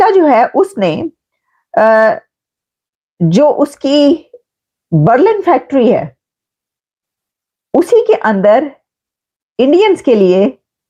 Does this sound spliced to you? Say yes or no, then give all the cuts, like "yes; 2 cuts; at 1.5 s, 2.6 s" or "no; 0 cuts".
no; 0 cuts